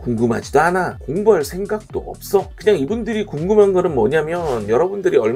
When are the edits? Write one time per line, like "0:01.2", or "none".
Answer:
none